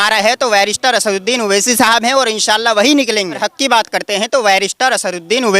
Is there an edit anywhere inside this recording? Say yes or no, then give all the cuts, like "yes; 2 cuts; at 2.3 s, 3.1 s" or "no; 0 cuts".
yes; 1 cut; at 3.4 s